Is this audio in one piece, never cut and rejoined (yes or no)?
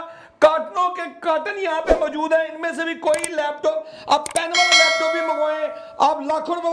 yes